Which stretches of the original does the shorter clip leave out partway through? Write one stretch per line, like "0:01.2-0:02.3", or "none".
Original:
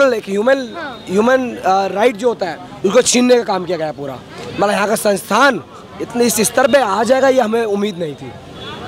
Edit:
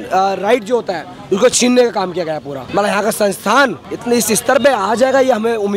0:04.1-0:04.4
0:05.7-0:06.0

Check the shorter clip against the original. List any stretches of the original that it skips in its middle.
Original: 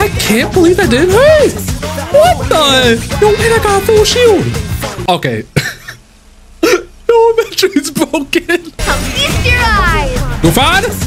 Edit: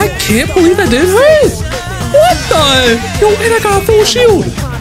none

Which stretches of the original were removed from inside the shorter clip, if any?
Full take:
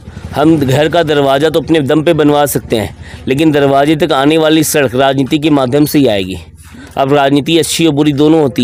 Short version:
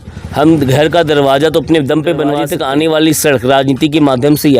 0:02.5-0:04.0

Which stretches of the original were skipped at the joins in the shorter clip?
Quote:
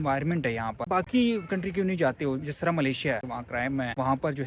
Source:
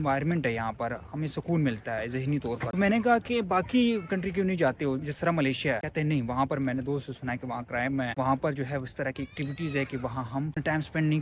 0:00.9-0:03.5
0:05.8-0:07.4

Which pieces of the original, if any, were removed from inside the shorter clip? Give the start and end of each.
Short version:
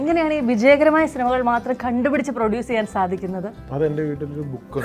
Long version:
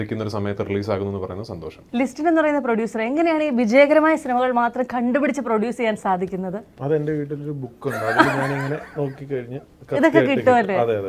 none

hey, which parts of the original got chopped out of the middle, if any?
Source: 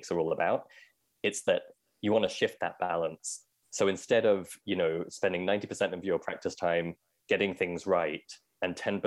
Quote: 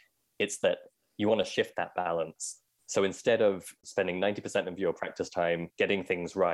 0:04.6-0:05.0
0:06.9-0:07.2

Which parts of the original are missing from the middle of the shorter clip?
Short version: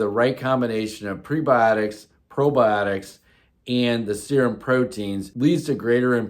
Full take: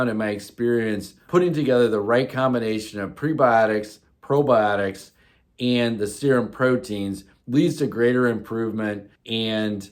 0:07.1-0:07.3

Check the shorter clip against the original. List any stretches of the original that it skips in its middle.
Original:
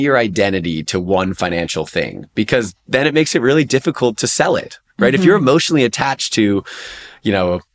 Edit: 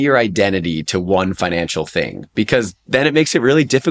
none

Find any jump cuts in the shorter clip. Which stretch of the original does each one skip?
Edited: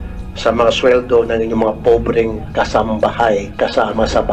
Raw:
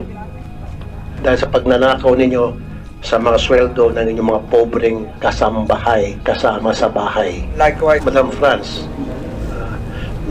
none

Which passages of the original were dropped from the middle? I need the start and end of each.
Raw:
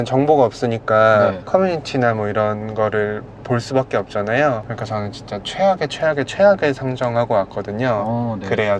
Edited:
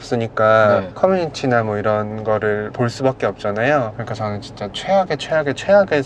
0:03.2-0:03.4

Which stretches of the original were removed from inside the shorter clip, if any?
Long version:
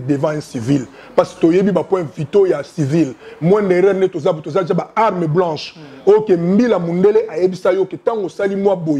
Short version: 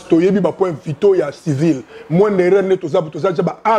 none

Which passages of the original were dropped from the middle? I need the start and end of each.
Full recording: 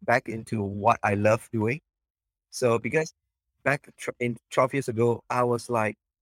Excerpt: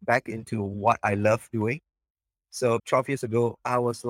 0:02.8-0:04.5

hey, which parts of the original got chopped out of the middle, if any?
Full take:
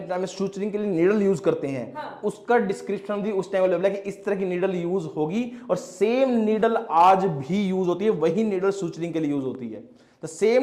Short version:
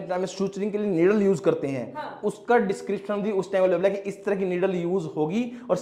none

